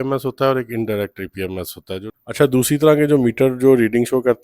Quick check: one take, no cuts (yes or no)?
no